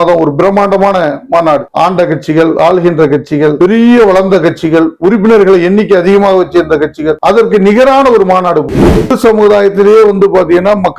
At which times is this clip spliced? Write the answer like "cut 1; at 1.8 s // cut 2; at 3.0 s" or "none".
cut 1; at 9.1 s